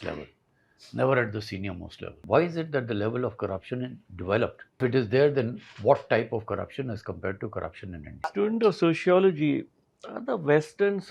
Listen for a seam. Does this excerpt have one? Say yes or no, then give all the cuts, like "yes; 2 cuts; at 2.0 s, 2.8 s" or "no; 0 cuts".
yes; 3 cuts; at 2.2 s, 4.8 s, 8.3 s